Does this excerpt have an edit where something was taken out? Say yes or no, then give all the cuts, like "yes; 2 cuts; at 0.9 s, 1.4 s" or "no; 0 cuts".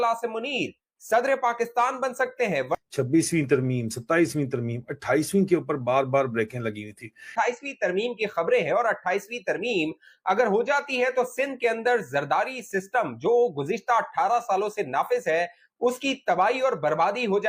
no; 0 cuts